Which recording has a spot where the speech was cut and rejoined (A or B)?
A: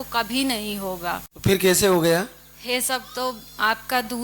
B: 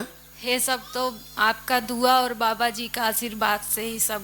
A